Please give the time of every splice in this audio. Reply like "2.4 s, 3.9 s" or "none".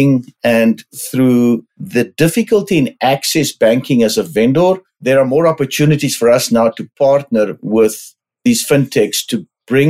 1.0 s, 1.8 s, 4.9 s